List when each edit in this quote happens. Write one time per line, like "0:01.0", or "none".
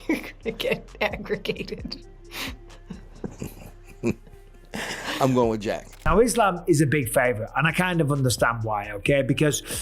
0:05.9